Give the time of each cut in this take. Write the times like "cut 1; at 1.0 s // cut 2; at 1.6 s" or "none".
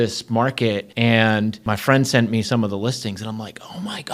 cut 1; at 0.9 s // cut 2; at 1.6 s